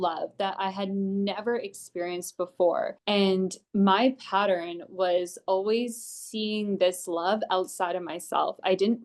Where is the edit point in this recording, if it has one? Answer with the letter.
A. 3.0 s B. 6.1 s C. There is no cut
A